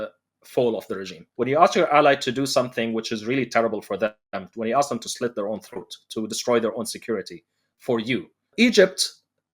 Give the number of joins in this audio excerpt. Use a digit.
2